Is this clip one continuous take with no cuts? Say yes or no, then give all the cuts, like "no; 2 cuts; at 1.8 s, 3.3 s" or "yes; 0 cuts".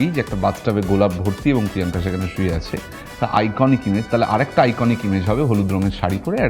yes; 0 cuts